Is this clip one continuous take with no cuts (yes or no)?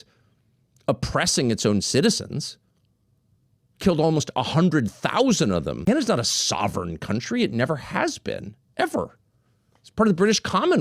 no